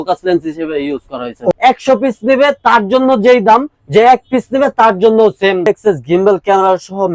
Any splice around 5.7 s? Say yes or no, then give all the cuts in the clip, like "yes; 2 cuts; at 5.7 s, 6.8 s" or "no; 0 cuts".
yes; 2 cuts; at 1.5 s, 5.7 s